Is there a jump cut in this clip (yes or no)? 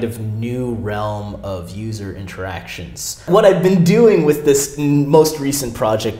yes